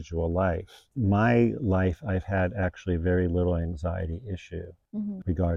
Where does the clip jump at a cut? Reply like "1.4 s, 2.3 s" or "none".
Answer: none